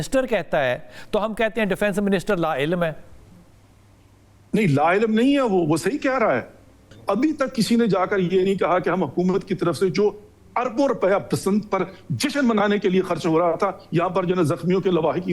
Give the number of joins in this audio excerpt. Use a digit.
1